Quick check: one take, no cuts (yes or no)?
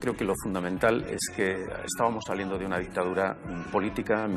yes